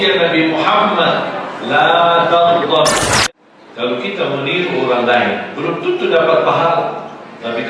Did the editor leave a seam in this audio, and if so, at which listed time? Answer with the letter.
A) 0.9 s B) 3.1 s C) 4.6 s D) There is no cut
B